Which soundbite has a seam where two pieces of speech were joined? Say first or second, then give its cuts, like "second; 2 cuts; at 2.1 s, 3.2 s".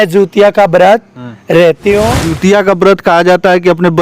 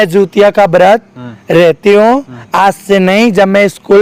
first; 1 cut; at 2.2 s